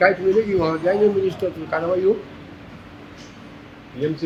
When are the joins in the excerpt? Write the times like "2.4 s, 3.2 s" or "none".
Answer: none